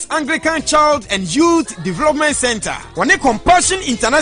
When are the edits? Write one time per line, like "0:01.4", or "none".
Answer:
0:02.7